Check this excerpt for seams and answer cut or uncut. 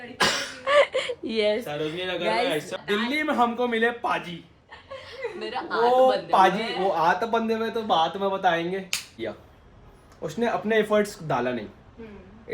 cut